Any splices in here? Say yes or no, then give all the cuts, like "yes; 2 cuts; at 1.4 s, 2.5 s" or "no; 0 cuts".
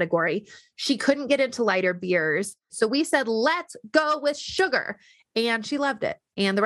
yes; 1 cut; at 2.7 s